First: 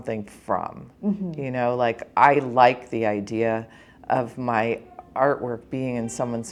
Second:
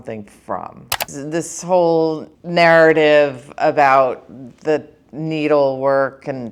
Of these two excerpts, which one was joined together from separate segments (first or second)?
second